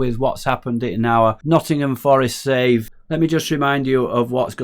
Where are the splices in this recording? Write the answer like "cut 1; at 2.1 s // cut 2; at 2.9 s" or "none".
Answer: cut 1; at 1.4 s // cut 2; at 3.0 s